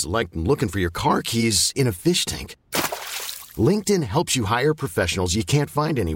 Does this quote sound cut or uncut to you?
uncut